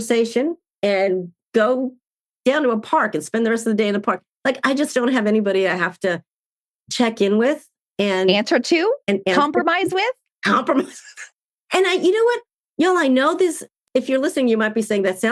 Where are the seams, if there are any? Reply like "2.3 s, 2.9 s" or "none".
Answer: none